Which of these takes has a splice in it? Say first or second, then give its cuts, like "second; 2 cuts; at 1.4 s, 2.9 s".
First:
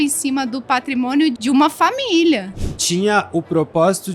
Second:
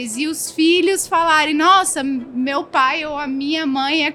first; 2 cuts; at 1.4 s, 2.6 s